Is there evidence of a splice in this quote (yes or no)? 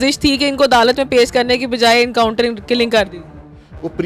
no